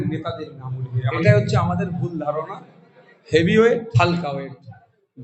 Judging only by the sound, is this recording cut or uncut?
cut